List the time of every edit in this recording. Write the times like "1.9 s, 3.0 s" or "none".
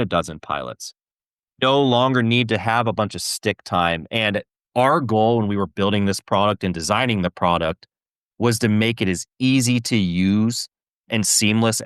4.7 s